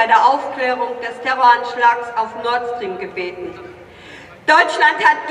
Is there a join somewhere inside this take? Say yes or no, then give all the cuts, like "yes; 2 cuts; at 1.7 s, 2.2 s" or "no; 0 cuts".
no; 0 cuts